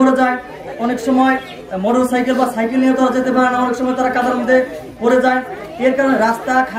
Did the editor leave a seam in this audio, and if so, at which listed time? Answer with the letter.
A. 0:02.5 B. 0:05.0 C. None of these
C